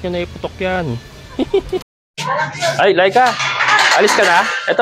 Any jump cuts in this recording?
yes; 1 cut; at 1.9 s

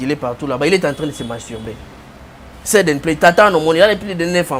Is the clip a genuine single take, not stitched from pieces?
yes; 0 cuts

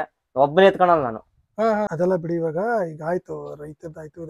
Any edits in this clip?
yes; 1 cut; at 1.9 s

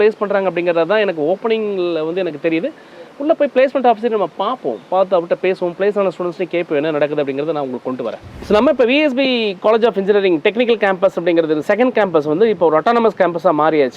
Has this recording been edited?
no; 0 cuts

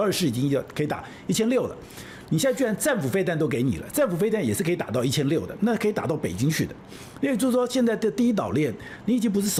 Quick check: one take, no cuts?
yes; 0 cuts

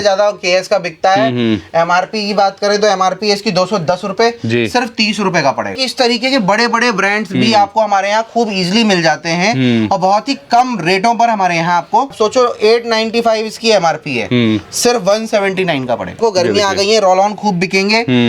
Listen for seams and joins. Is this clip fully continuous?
no; 3 cuts; at 5.8 s, 12.1 s, 16.2 s

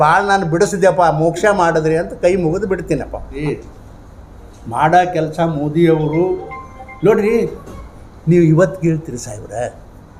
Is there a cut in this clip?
yes; 1 cut; at 3.3 s

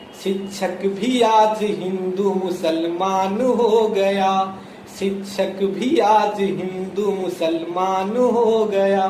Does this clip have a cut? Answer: no; 0 cuts

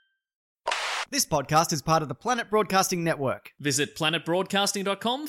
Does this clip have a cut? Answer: yes; 1 cut; at 0.9 s

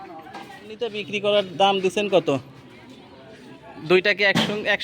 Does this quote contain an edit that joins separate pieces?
yes; 1 cut; at 1.0 s

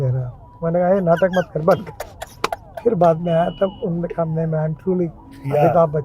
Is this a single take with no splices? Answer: yes; 0 cuts

